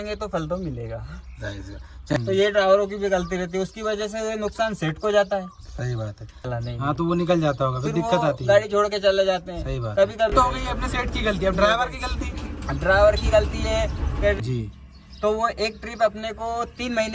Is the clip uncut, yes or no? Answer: no